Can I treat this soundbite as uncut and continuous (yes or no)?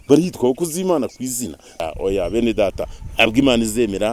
no